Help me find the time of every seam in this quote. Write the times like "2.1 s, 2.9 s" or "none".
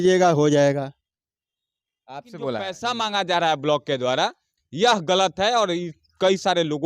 2.8 s